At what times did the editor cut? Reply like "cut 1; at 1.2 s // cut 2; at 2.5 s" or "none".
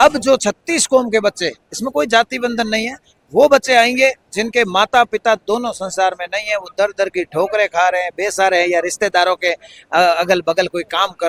none